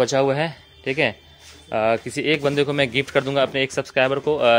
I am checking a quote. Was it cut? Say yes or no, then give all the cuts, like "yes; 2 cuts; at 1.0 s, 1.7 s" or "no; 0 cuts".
no; 0 cuts